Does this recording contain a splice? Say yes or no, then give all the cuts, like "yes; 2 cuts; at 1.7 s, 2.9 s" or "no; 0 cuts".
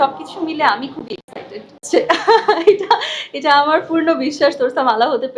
no; 0 cuts